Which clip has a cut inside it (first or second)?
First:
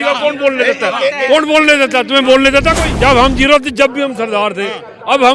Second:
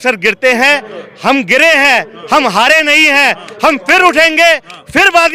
first